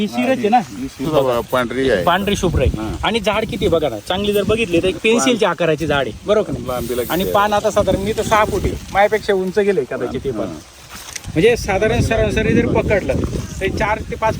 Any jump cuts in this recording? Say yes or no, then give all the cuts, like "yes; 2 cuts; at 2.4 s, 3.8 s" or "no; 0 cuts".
yes; 1 cut; at 1.0 s